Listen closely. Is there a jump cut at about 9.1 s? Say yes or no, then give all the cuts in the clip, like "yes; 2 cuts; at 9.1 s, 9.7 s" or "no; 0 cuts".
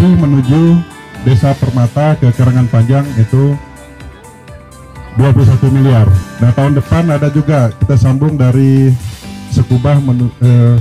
no; 1 cut; at 6.2 s